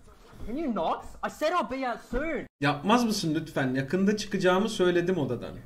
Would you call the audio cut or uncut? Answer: uncut